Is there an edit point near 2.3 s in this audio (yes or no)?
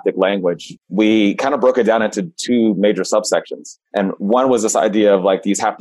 no